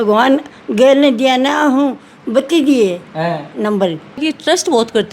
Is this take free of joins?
no; 1 cut; at 4.2 s

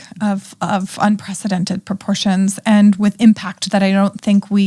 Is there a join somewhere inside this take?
no; 0 cuts

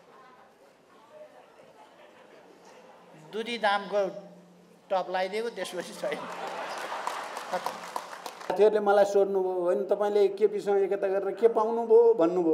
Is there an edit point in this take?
yes; 1 cut; at 8.5 s

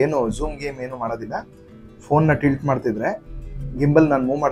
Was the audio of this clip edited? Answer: no; 0 cuts

